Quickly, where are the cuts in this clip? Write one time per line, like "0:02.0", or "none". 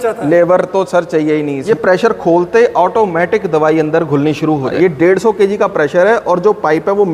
0:01.6
0:04.7